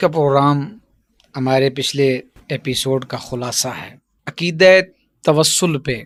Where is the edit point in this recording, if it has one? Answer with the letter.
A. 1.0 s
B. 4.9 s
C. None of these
C